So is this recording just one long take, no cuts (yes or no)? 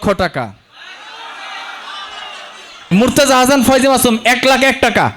no